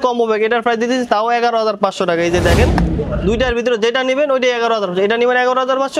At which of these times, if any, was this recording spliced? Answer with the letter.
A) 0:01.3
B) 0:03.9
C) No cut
C